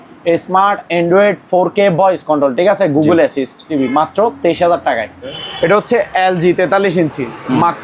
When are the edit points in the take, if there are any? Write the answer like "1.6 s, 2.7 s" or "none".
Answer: 3.7 s, 5.3 s